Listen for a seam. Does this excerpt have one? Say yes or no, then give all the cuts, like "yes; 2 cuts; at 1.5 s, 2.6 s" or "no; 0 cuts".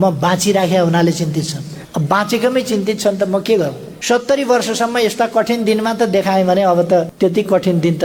yes; 3 cuts; at 1.8 s, 4.0 s, 7.1 s